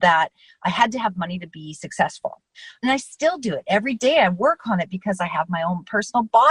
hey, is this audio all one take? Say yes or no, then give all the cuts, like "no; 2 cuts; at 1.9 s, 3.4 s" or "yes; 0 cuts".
yes; 0 cuts